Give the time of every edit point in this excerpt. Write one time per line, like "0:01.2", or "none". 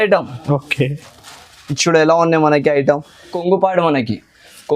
0:03.4